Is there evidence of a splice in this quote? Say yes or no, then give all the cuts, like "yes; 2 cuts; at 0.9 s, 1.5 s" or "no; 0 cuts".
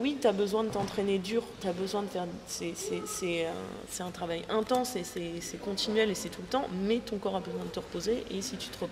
no; 0 cuts